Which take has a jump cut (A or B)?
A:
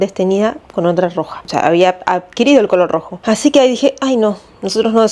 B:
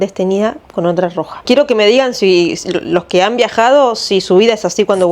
B